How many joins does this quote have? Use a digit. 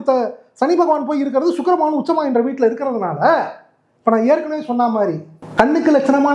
0